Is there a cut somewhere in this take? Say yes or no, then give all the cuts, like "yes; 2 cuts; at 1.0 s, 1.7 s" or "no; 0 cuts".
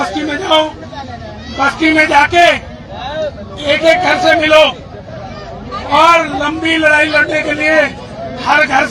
no; 0 cuts